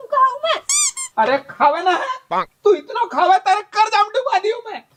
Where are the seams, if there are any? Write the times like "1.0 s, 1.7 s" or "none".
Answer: none